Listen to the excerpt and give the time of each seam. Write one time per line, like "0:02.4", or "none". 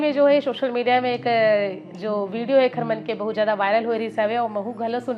none

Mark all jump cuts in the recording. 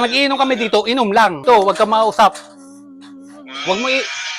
0:01.4

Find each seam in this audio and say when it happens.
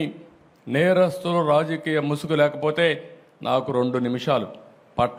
none

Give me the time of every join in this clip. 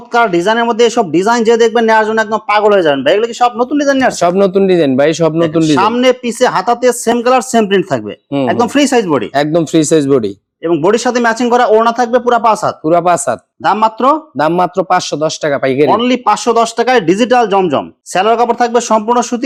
none

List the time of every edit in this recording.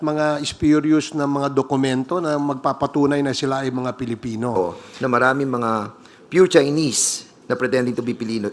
0:04.5

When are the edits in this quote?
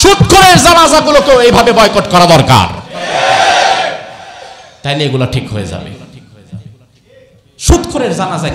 none

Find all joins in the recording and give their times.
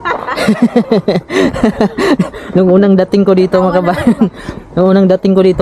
none

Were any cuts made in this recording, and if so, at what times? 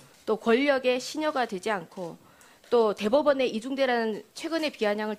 0:01.0

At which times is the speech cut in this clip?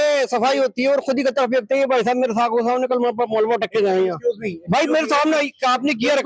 none

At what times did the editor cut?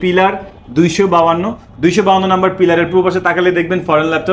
none

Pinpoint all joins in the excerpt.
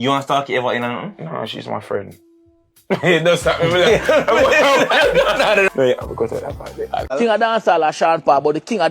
0:07.1

